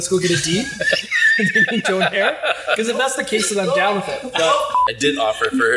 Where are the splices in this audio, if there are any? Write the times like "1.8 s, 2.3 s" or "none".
4.8 s